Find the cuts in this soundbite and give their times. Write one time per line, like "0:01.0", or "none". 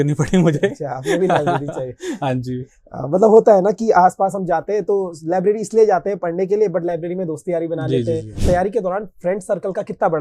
0:08.4